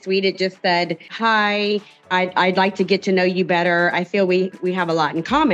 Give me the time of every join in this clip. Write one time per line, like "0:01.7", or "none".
0:04.5